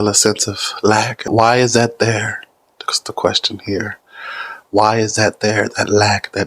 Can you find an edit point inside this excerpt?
yes; 1 cut; at 1.3 s

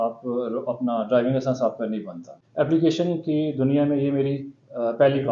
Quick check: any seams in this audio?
yes; 1 cut; at 2.4 s

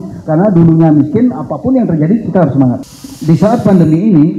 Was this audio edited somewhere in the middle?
yes; 1 cut; at 2.8 s

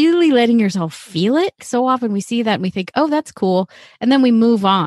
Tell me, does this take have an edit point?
yes; 1 cut; at 1.6 s

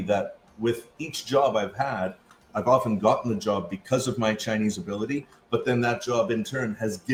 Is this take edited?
no; 0 cuts

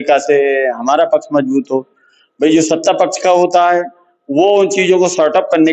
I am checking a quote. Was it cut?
no; 0 cuts

